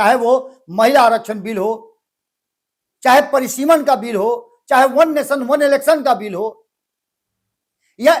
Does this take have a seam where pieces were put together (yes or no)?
no